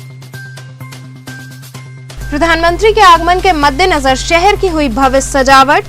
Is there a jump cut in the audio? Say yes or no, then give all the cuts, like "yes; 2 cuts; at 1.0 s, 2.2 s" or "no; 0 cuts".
no; 0 cuts